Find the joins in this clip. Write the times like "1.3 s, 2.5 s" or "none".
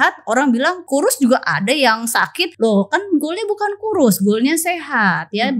0.8 s, 2.4 s